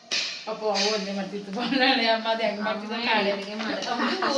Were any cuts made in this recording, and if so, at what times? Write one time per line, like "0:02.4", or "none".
none